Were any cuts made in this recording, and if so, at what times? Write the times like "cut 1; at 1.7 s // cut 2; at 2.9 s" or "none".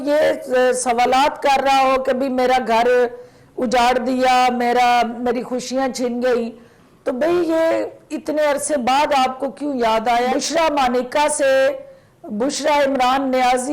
cut 1; at 10.3 s